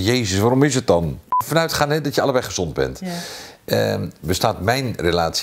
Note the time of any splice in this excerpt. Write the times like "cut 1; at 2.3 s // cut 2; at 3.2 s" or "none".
cut 1; at 1.3 s

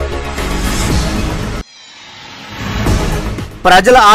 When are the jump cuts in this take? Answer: cut 1; at 1.4 s // cut 2; at 3.1 s

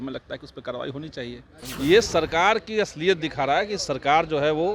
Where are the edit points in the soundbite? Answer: cut 1; at 1.6 s

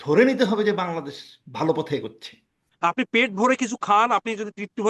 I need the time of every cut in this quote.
cut 1; at 2.7 s

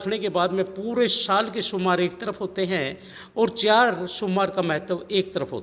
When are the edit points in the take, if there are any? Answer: none

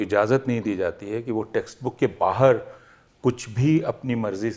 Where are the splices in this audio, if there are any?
none

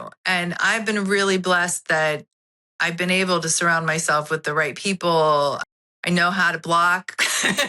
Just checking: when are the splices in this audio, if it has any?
cut 1; at 5.7 s

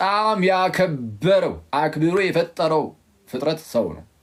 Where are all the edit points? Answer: none

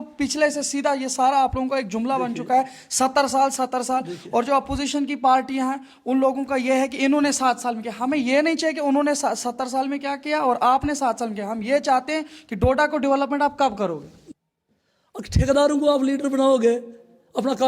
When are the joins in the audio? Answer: cut 1; at 14.2 s

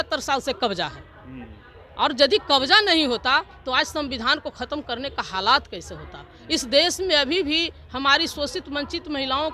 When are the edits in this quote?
none

